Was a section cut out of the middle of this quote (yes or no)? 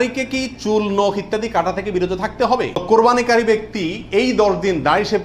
yes